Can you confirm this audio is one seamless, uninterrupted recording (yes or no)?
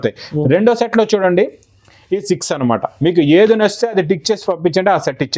yes